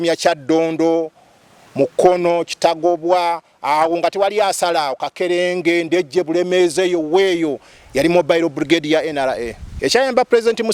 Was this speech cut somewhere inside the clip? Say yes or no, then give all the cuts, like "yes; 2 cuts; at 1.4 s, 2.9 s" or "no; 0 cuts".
yes; 1 cut; at 9.6 s